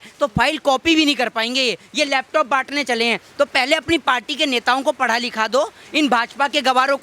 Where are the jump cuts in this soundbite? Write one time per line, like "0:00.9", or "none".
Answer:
none